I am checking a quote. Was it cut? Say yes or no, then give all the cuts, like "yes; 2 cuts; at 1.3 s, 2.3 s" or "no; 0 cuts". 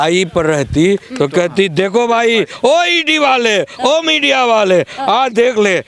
no; 0 cuts